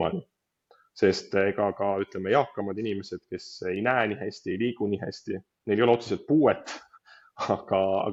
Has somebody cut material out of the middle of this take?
no; 0 cuts

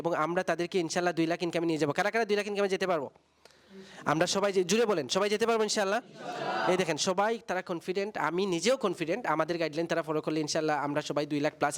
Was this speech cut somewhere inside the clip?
no; 0 cuts

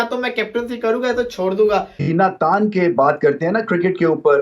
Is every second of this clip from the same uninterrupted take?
no; 1 cut; at 2.0 s

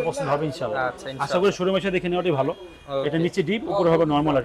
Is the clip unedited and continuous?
yes; 0 cuts

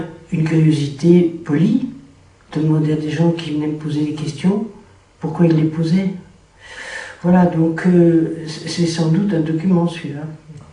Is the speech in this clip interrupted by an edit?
no; 0 cuts

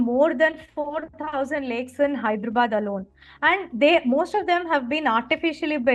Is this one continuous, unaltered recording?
yes; 0 cuts

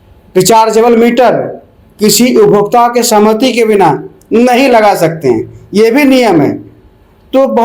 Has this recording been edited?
no; 0 cuts

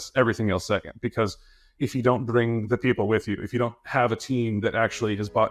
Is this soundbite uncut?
yes; 0 cuts

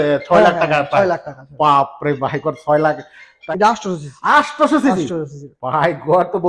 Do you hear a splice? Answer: yes; 1 cut; at 3.4 s

